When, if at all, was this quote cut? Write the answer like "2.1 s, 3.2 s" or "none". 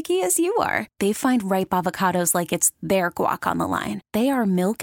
none